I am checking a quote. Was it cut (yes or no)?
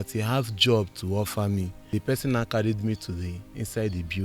yes